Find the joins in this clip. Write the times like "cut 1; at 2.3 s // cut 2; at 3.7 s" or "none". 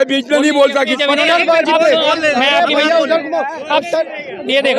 cut 1; at 0.9 s